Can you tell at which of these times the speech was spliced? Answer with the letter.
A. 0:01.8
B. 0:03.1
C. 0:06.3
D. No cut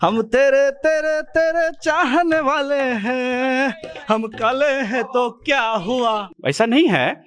C